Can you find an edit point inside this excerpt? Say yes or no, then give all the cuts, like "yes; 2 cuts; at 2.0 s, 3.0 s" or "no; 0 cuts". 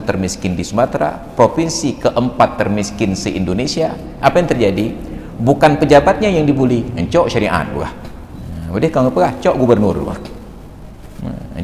no; 0 cuts